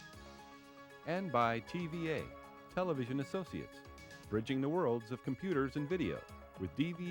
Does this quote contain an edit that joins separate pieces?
no; 0 cuts

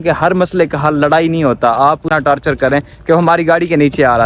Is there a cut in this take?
yes; 1 cut; at 2.0 s

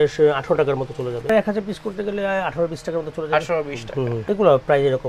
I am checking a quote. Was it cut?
yes; 2 cuts; at 1.3 s, 4.2 s

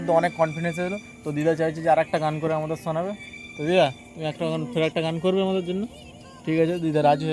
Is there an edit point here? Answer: no; 0 cuts

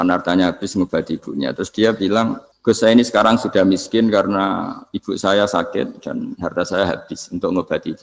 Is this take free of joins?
no; 1 cut; at 2.5 s

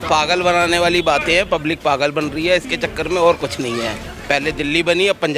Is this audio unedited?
yes; 0 cuts

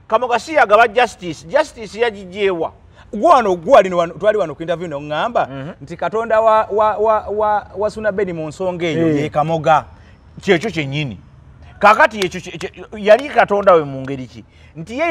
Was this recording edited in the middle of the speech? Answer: no; 0 cuts

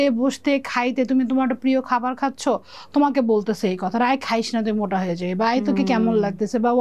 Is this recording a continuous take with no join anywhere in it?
yes; 0 cuts

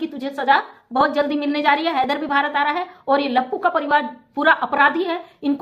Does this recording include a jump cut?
no; 0 cuts

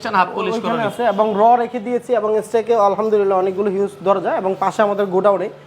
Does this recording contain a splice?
no; 0 cuts

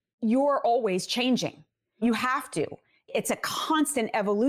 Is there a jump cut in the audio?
yes; 2 cuts; at 2.0 s, 3.1 s

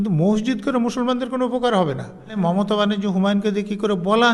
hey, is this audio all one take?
no; 1 cut; at 2.4 s

